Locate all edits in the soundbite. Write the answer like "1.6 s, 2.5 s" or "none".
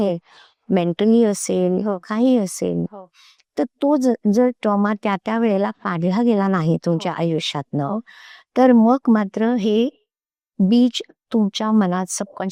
none